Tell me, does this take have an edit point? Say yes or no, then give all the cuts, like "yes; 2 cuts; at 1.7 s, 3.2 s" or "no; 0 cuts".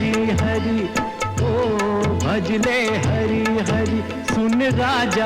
no; 0 cuts